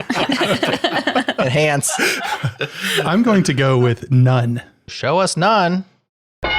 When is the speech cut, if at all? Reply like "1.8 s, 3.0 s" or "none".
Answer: 4.8 s